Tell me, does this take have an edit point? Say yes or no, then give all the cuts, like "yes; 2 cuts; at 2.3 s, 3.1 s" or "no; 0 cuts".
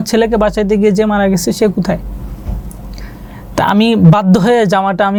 no; 0 cuts